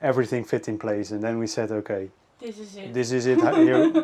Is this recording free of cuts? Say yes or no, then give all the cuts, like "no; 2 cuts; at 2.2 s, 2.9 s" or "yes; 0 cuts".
yes; 0 cuts